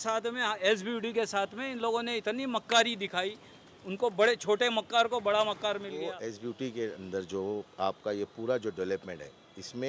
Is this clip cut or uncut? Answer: cut